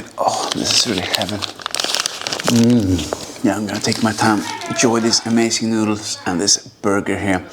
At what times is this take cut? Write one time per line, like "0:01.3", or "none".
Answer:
0:02.3
0:03.3